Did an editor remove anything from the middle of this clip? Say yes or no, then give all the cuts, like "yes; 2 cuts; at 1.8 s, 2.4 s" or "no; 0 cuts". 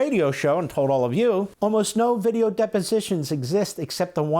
yes; 1 cut; at 1.5 s